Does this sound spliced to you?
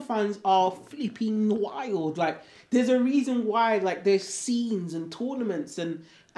no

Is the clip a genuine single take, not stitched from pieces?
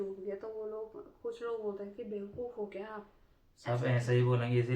yes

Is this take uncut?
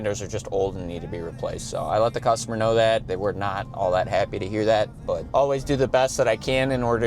no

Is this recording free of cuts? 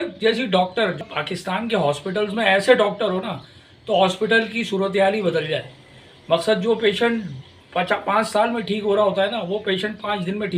no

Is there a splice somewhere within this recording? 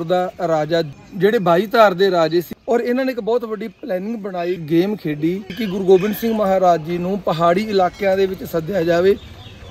yes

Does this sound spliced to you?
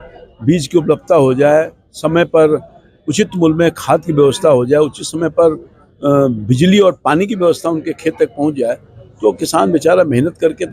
no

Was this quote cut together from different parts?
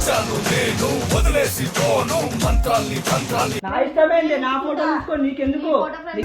yes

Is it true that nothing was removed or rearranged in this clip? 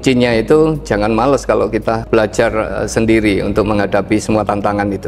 yes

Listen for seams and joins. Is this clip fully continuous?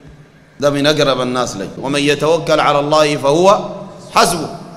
no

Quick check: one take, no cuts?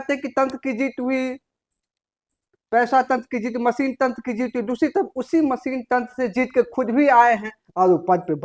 yes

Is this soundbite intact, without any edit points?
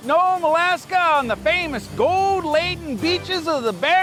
yes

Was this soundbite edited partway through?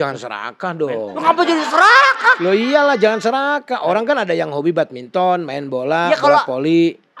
no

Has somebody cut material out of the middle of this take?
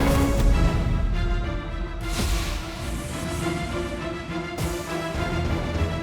yes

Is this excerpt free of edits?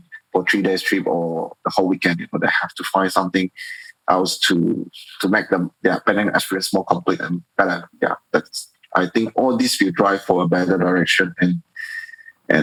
yes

